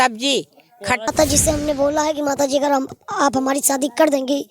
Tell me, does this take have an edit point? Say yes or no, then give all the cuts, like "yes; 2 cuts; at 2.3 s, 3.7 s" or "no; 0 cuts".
yes; 1 cut; at 1.1 s